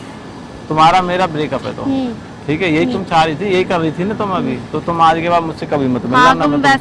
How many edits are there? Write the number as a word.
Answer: zero